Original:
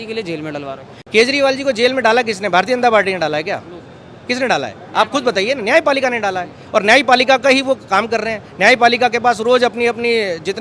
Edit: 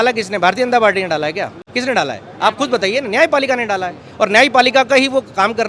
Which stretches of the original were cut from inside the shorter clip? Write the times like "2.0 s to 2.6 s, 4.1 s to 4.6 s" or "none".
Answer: 3.7 s to 4.1 s